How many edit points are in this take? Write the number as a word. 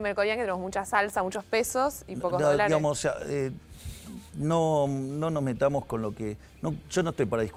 zero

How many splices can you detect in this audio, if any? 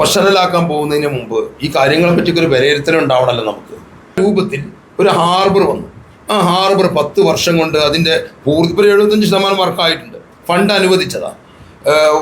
one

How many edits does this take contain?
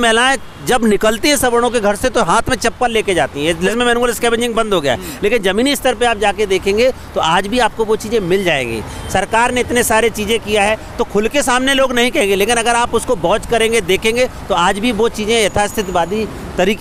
zero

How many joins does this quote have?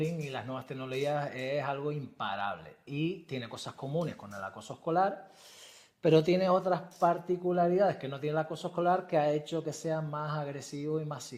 zero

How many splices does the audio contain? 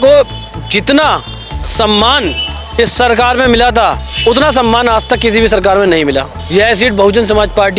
two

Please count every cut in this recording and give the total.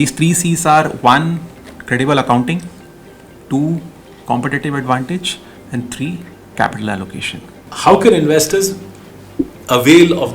one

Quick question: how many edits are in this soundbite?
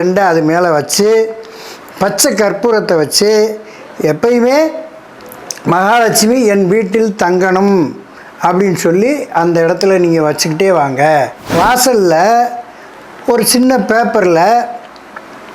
one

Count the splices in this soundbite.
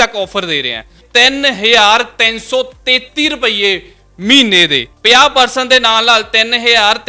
two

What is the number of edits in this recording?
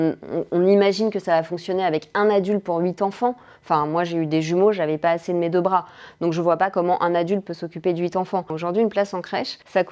one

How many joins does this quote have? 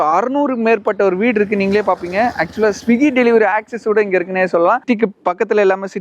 zero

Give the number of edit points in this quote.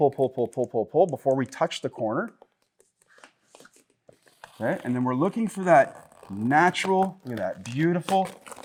zero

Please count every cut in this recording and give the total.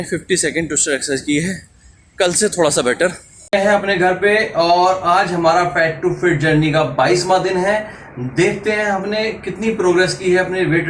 one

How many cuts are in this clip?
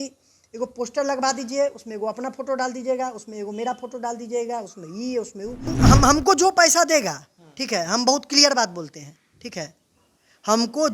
one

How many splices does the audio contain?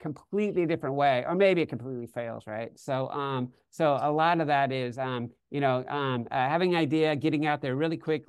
zero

